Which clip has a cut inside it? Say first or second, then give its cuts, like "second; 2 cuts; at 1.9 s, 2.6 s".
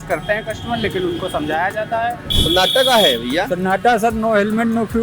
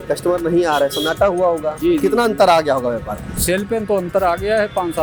first; 1 cut; at 2.3 s